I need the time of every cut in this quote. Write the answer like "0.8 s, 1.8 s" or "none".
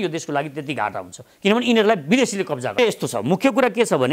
none